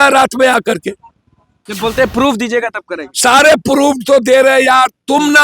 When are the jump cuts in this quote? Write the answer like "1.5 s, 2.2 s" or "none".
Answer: 1.7 s